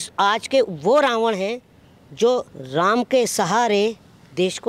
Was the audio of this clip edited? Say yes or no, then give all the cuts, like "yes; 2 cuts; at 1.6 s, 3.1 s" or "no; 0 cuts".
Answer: yes; 1 cut; at 2.6 s